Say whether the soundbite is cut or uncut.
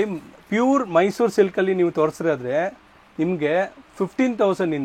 uncut